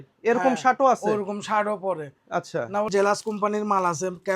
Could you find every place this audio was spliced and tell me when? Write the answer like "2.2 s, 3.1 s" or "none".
2.9 s